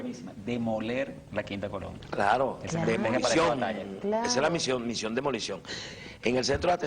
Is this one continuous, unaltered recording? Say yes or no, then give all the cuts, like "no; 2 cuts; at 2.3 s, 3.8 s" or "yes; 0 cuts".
no; 1 cut; at 5.0 s